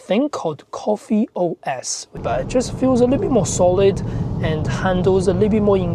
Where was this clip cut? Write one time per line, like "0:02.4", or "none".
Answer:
0:02.2